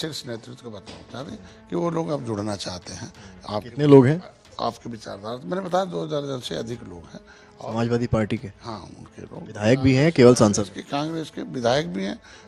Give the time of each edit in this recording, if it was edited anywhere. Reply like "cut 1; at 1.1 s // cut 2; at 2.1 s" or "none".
none